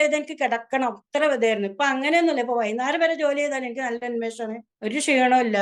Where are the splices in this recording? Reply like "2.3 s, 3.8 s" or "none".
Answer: 4.7 s